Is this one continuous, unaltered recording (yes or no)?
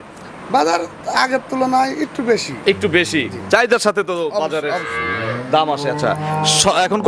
yes